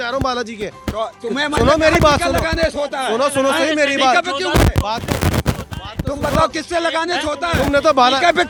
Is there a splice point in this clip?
no; 0 cuts

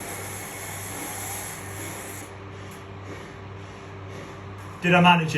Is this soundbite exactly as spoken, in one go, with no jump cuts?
yes; 0 cuts

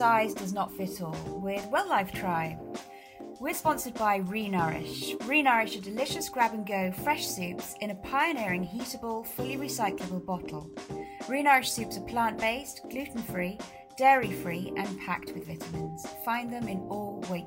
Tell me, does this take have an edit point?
no; 0 cuts

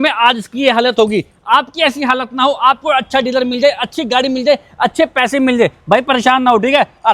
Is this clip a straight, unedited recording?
yes; 0 cuts

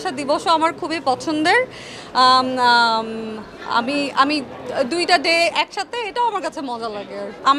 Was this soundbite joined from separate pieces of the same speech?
no; 0 cuts

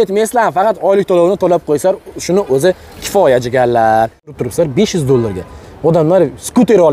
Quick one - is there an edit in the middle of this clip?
yes; 1 cut; at 4.4 s

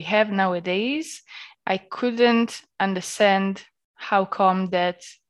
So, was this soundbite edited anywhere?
no; 0 cuts

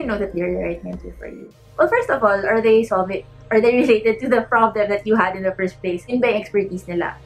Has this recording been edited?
no; 0 cuts

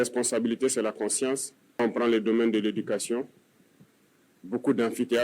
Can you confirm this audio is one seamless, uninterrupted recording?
no; 1 cut; at 1.8 s

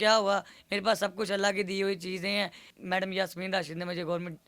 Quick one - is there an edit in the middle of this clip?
yes; 1 cut; at 2.6 s

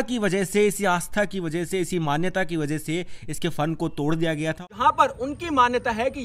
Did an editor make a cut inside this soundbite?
yes; 1 cut; at 4.6 s

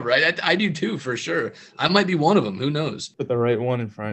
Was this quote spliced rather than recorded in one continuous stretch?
yes; 1 cut; at 3.0 s

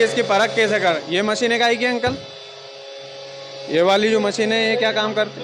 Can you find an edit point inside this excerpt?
yes; 1 cut; at 1.0 s

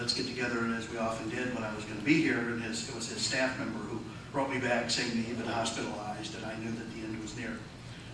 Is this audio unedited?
no; 1 cut; at 6.9 s

